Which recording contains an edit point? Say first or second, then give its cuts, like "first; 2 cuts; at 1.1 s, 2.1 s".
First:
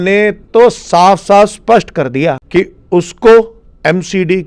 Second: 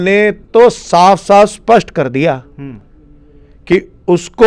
first; 1 cut; at 2.4 s